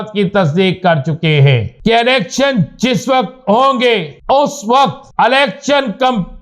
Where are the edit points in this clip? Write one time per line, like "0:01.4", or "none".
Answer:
0:01.7
0:04.1
0:05.0